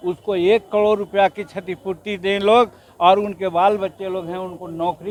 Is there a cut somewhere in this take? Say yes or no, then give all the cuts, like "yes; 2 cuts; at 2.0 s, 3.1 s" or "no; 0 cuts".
no; 0 cuts